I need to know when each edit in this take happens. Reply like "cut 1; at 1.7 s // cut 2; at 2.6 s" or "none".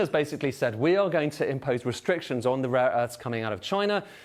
none